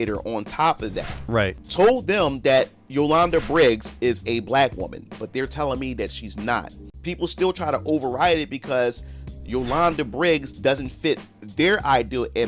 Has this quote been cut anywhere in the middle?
yes; 2 cuts; at 1.6 s, 6.9 s

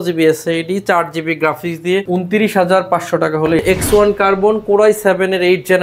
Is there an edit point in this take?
yes; 2 cuts; at 2.0 s, 3.6 s

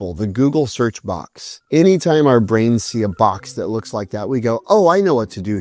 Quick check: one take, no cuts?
yes; 0 cuts

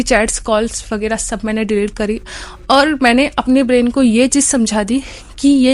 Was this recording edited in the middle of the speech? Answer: no; 0 cuts

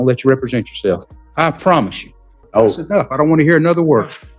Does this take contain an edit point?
yes; 2 cuts; at 1.2 s, 2.3 s

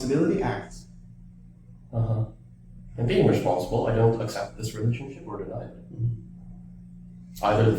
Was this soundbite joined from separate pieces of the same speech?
yes; 1 cut; at 2.8 s

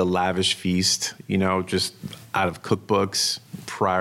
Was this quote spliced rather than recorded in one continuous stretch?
no; 0 cuts

